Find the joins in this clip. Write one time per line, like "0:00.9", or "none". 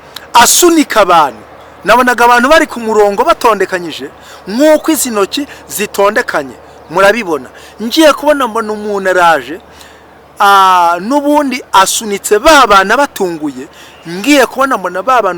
none